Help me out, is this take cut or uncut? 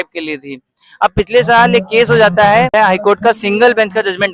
cut